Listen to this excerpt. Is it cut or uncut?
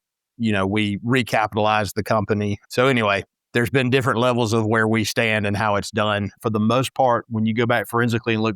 cut